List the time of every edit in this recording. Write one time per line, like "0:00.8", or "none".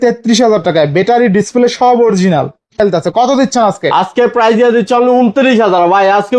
0:02.8